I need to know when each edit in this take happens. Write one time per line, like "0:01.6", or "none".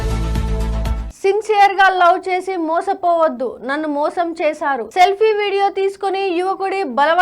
0:01.0